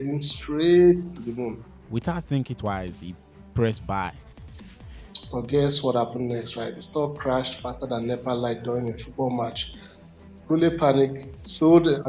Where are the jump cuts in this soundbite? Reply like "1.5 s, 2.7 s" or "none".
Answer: 1.7 s, 4.5 s